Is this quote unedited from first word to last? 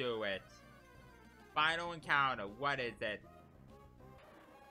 yes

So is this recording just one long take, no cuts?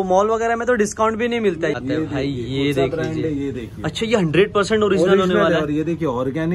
no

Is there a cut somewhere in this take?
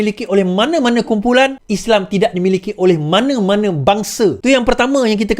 yes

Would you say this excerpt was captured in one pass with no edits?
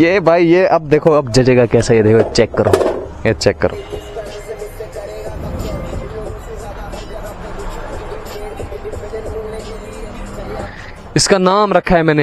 no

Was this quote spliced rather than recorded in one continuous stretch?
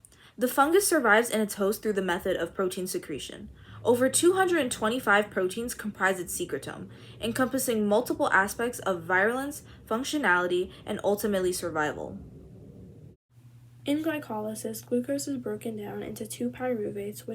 yes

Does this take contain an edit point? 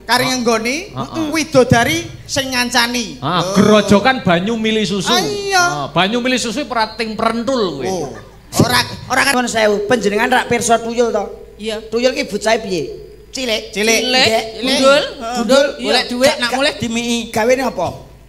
yes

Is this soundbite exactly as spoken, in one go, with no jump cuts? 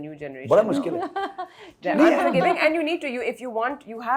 yes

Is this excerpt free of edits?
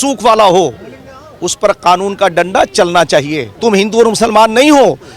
no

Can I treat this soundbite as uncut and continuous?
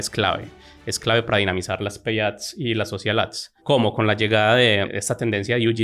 no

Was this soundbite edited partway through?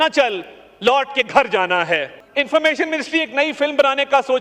yes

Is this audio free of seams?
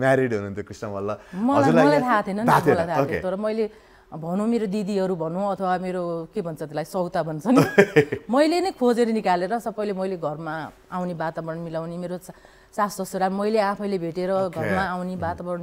yes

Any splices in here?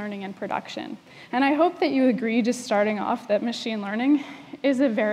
yes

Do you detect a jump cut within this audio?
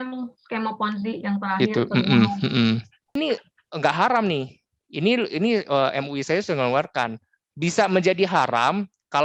yes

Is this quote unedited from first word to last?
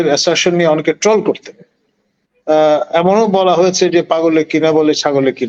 yes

